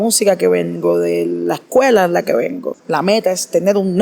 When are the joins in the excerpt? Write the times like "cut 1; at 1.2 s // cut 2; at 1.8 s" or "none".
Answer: cut 1; at 2.7 s